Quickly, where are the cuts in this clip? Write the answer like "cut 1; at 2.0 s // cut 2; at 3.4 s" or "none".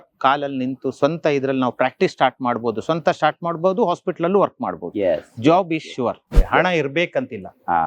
cut 1; at 6.3 s